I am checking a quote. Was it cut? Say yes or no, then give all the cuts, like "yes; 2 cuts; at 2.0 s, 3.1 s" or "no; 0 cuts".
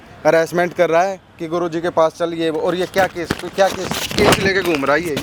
no; 0 cuts